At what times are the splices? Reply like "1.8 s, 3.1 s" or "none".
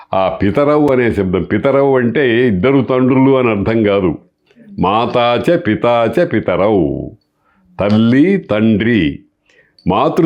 none